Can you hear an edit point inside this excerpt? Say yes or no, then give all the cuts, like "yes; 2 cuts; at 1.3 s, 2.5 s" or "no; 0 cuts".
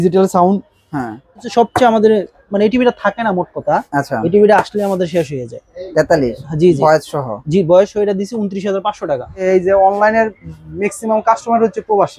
yes; 2 cuts; at 1.5 s, 9.4 s